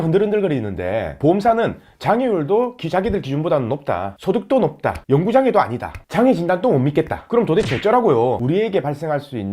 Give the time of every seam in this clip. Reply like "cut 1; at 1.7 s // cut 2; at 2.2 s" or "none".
cut 1; at 8.4 s